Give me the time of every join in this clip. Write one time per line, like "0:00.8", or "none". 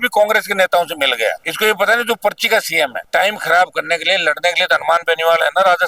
0:01.4
0:03.0